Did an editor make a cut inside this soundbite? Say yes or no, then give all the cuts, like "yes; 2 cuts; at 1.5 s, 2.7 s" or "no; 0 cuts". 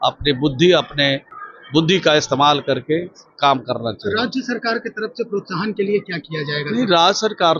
no; 0 cuts